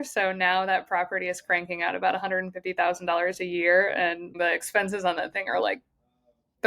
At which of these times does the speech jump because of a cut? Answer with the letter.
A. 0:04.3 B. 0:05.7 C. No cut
A